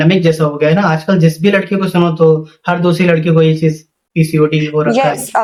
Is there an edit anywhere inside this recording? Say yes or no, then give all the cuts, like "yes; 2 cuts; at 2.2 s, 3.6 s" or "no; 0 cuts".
no; 0 cuts